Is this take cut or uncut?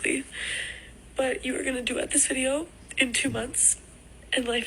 uncut